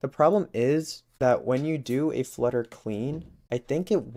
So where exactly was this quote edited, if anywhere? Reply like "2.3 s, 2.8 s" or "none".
none